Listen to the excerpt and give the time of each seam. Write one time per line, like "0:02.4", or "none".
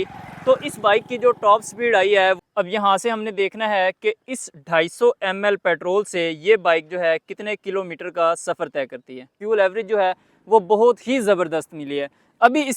0:02.4
0:09.3